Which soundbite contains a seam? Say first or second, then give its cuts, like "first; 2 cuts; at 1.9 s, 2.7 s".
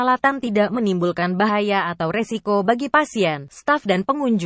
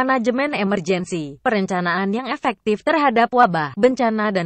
second; 2 cuts; at 1.4 s, 3.5 s